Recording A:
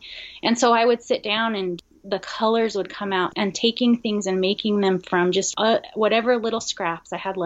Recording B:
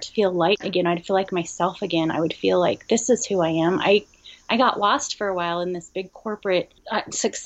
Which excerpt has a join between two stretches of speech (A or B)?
A